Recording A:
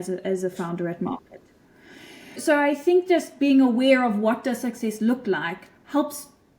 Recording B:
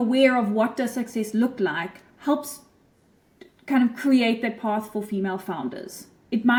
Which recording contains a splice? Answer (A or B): A